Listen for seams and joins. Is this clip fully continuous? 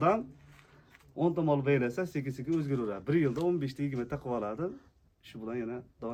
yes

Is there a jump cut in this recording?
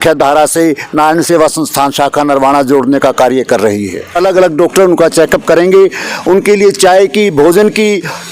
yes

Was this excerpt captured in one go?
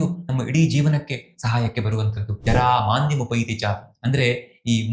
no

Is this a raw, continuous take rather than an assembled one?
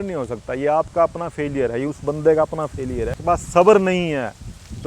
no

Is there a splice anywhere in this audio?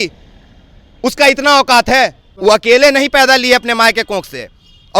yes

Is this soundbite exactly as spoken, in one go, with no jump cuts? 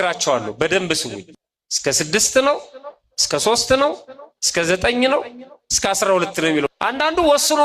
no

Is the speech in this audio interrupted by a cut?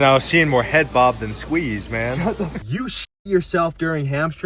yes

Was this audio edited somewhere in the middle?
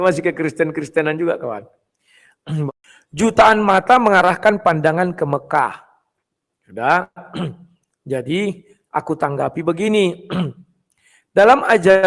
yes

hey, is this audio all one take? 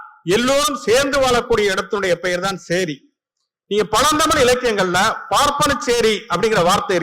yes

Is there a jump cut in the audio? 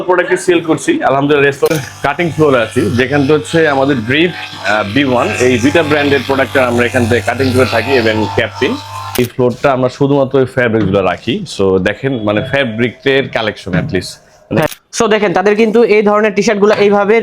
yes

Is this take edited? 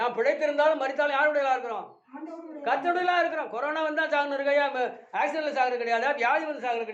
no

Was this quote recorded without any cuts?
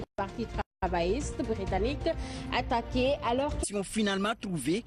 yes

